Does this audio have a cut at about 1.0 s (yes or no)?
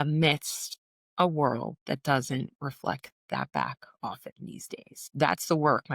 no